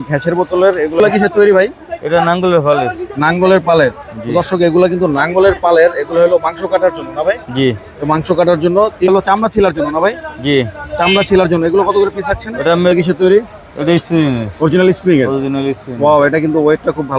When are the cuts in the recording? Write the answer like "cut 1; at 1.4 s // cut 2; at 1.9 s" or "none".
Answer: cut 1; at 1.0 s // cut 2; at 9.1 s // cut 3; at 12.9 s